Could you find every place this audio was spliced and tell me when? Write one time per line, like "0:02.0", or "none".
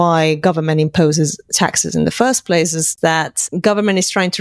0:02.9